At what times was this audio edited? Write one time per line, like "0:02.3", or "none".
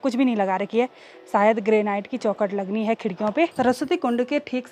0:03.5